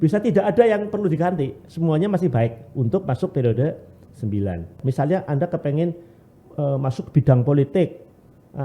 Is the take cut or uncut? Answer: cut